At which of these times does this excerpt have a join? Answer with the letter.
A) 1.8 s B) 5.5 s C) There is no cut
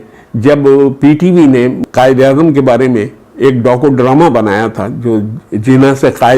A